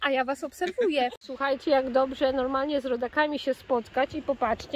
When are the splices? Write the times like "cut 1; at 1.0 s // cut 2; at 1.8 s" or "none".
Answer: cut 1; at 1.2 s